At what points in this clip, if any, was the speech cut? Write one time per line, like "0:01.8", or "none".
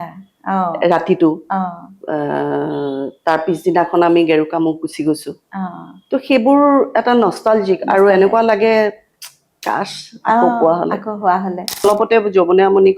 0:11.8